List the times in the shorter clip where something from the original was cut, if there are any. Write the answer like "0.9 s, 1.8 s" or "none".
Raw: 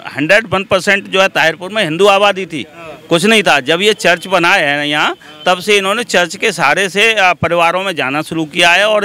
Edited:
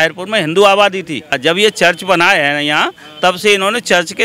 1.4 s